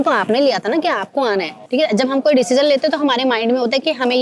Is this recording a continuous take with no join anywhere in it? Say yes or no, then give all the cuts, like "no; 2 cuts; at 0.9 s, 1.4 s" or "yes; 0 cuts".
yes; 0 cuts